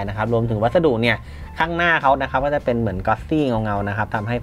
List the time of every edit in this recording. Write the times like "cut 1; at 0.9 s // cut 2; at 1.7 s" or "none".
none